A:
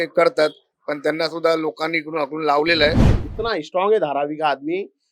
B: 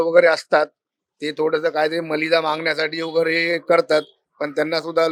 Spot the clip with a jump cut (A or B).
A